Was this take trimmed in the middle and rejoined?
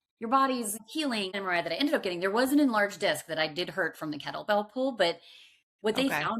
yes; 1 cut; at 1.0 s

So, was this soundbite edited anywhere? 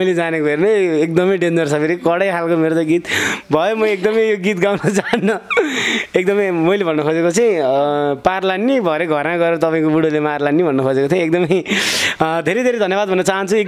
no; 0 cuts

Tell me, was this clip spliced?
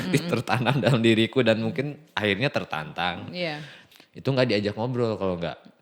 yes; 1 cut; at 3.8 s

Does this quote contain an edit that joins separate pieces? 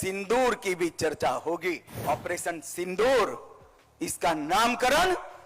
yes; 1 cut; at 2.0 s

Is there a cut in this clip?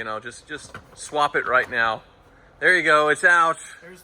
no; 0 cuts

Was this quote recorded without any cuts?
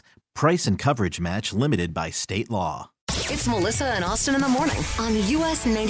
no; 1 cut; at 3.1 s

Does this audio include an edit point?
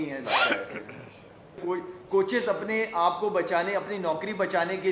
yes; 1 cut; at 1.6 s

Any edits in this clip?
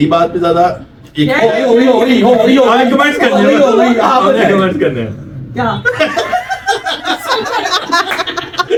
no; 0 cuts

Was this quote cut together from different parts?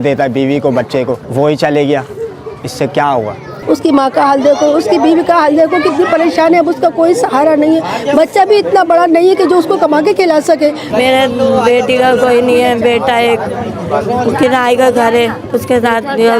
yes; 3 cuts; at 1.2 s, 3.5 s, 10.8 s

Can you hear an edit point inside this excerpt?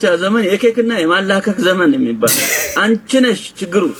no; 0 cuts

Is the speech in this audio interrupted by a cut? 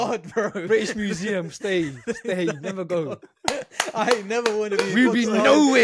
no; 0 cuts

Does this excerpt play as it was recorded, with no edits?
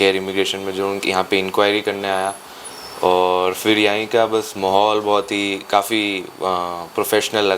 yes; 0 cuts

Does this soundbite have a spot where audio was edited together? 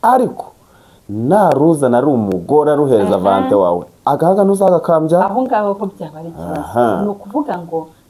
no; 0 cuts

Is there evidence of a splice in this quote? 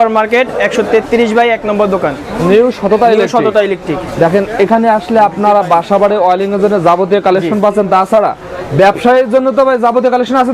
no; 0 cuts

